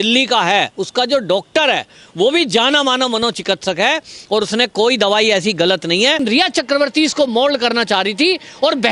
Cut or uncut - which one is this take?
cut